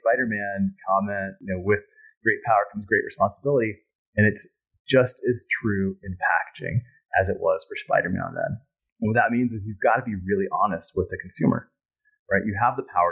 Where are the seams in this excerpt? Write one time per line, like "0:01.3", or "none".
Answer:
0:01.4